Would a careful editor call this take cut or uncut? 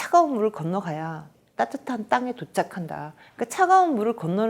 cut